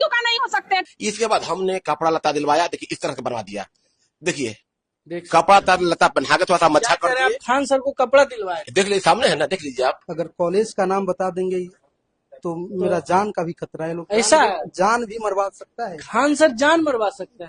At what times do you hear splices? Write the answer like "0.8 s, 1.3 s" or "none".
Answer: 0.9 s, 10.0 s